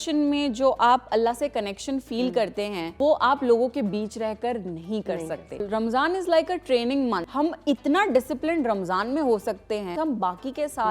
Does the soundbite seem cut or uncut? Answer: cut